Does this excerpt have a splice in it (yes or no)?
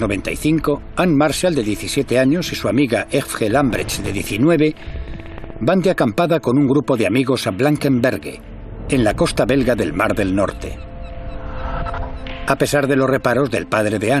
yes